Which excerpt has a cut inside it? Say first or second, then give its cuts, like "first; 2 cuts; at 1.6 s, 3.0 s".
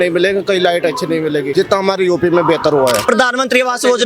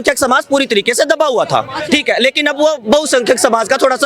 first; 2 cuts; at 1.5 s, 3.0 s